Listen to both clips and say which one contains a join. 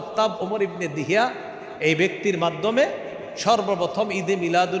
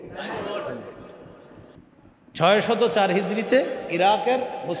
second; 1 cut; at 1.8 s

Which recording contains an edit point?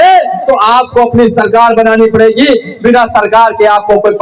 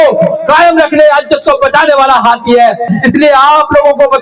second; 1 cut; at 2.9 s

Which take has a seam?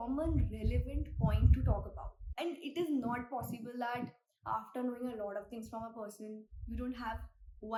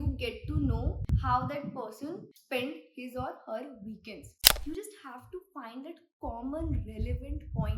second; 3 cuts; at 1.0 s, 2.3 s, 4.3 s

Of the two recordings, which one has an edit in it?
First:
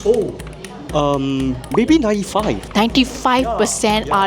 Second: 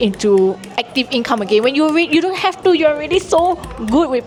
first; 2 cuts; at 1.6 s, 2.6 s

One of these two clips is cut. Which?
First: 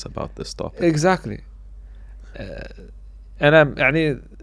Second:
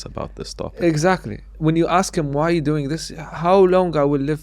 second; 1 cut; at 1.5 s

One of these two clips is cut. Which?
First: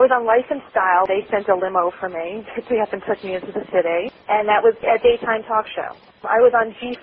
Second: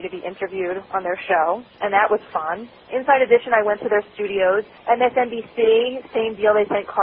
first; 2 cuts; at 1.1 s, 6.1 s

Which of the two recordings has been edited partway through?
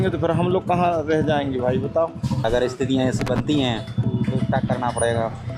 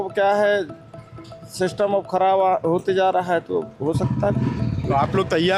first; 1 cut; at 2.5 s

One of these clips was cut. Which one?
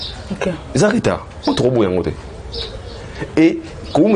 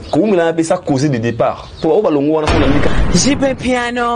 second; 1 cut; at 3.0 s

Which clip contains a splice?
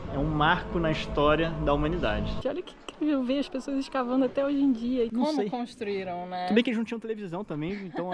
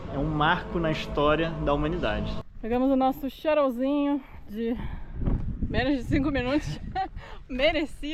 first; 2 cuts; at 2.4 s, 5.1 s

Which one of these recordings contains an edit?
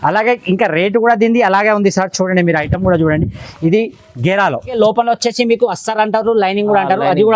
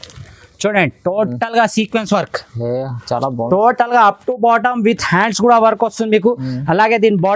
first; 1 cut; at 4.8 s

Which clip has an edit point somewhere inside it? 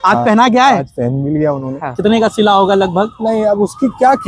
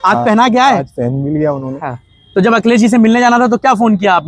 first; 1 cut; at 1.9 s

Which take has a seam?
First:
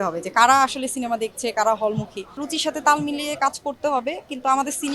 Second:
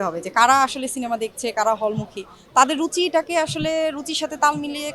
first; 1 cut; at 2.4 s

